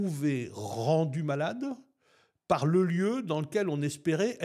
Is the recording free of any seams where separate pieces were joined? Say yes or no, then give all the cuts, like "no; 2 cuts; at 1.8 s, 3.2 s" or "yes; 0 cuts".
yes; 0 cuts